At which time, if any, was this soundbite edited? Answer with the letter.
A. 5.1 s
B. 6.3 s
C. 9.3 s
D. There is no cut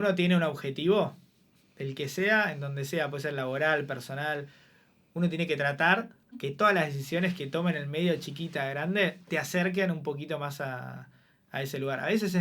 B